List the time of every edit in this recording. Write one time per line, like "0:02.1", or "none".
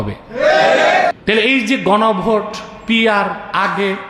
0:01.1